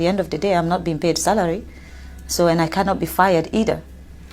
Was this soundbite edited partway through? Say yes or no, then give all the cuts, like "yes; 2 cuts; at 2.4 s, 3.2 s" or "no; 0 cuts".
no; 0 cuts